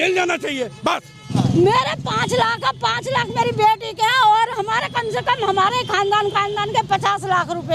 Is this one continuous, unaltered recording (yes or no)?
no